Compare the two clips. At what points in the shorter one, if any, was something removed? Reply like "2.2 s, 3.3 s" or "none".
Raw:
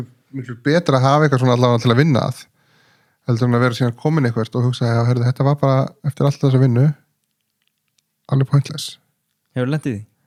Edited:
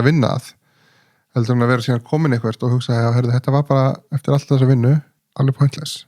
5.2 s

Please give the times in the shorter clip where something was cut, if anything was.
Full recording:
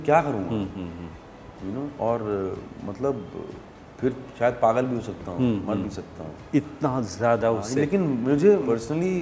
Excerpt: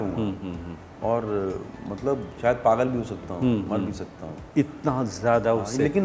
0.9 s, 2.3 s

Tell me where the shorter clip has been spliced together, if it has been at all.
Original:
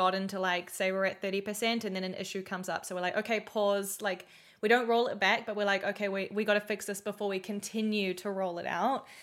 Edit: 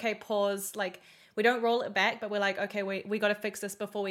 none

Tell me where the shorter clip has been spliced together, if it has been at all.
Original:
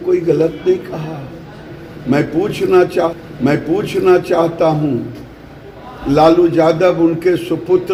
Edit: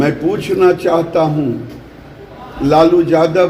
0.9 s

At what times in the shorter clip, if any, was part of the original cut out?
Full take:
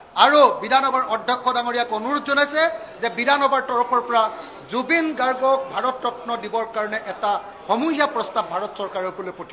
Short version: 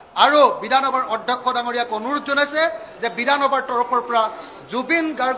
none

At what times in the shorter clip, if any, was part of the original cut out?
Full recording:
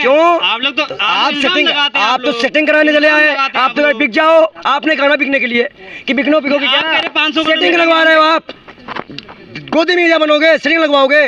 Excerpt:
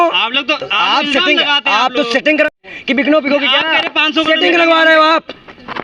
2.5 s

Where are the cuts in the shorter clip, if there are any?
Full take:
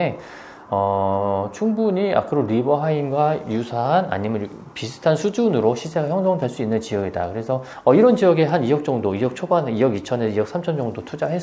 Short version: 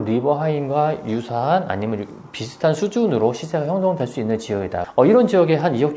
4.9 s

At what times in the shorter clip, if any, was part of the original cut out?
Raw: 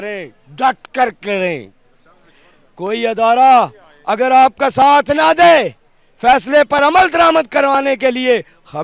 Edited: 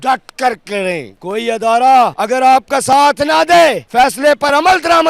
1.1 s, 2.2 s, 3.8 s

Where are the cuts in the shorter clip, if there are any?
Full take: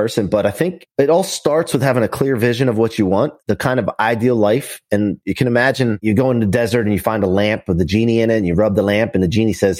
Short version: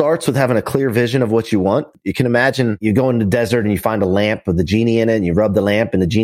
2.0 s

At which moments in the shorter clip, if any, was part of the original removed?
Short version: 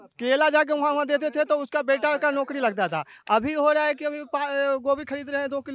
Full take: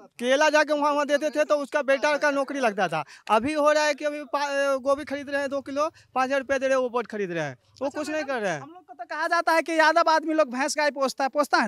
none

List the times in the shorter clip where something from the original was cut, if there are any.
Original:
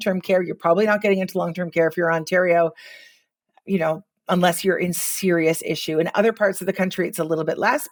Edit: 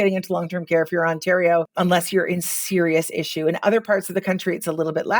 1.7 s

